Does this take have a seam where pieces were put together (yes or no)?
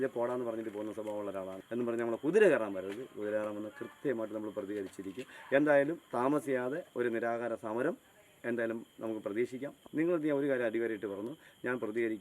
yes